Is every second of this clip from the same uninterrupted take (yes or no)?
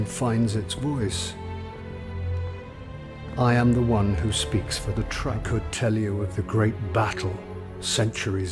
no